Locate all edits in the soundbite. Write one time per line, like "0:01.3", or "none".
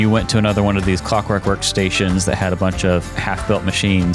none